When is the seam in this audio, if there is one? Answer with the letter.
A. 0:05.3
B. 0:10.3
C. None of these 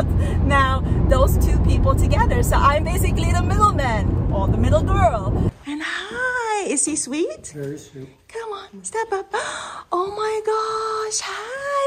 A